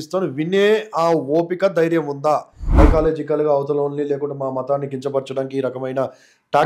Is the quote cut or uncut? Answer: cut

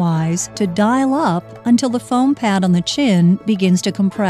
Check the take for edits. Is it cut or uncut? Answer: uncut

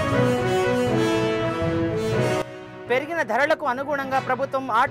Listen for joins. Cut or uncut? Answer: cut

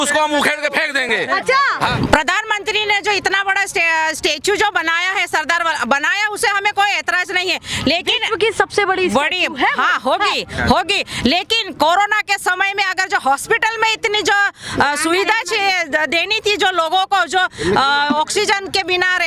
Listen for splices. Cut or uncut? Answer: uncut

